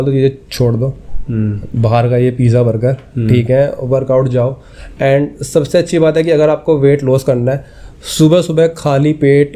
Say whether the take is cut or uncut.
uncut